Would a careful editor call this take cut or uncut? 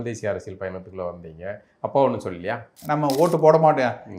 cut